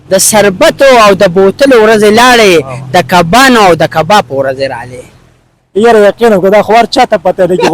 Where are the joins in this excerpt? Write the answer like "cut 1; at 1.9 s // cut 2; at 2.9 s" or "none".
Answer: none